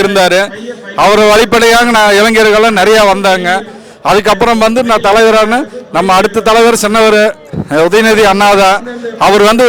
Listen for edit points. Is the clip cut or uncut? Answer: uncut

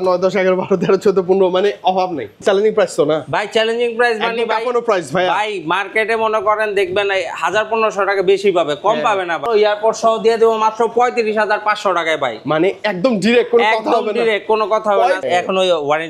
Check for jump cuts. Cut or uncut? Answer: cut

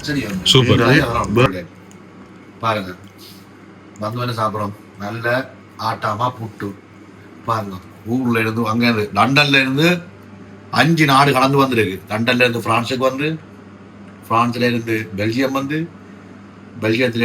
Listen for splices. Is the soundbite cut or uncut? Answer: cut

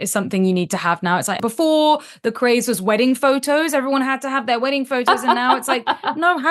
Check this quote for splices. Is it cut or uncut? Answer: cut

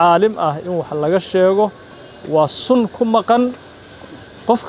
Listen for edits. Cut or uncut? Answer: uncut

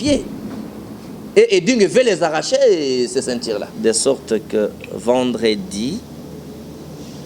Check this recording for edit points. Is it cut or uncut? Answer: cut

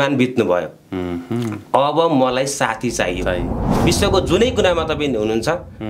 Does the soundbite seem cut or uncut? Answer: cut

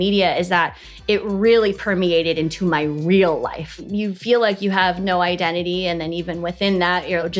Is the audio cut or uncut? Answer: cut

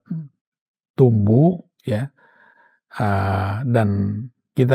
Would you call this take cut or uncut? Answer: uncut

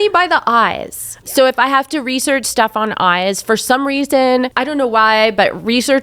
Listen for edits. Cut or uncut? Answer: cut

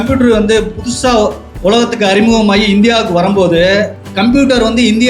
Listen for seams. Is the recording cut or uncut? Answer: cut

